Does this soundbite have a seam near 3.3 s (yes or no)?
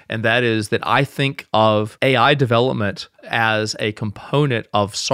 no